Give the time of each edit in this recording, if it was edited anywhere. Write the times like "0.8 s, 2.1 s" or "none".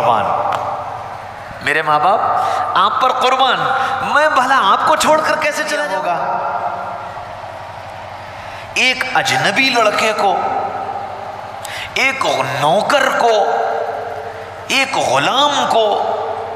5.9 s